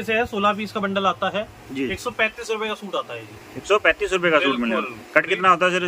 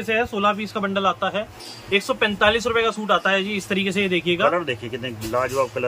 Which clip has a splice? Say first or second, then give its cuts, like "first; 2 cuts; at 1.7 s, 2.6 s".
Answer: second; 1 cut; at 1.6 s